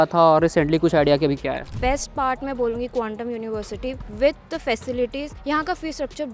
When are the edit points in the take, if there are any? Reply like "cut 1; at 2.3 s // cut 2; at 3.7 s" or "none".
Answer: cut 1; at 1.7 s // cut 2; at 5.3 s